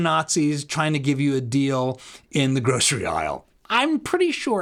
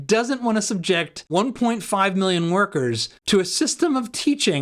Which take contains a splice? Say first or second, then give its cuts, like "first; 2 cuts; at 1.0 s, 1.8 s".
second; 2 cuts; at 1.2 s, 3.1 s